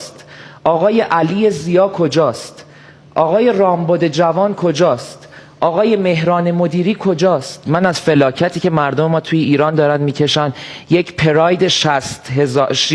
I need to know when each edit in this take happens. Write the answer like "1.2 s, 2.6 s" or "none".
7.6 s